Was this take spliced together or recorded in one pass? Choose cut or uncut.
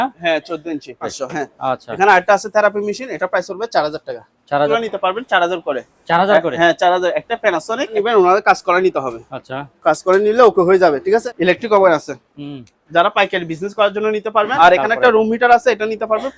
cut